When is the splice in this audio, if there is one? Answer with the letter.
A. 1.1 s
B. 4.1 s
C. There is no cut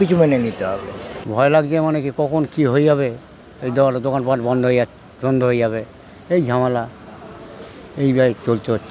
A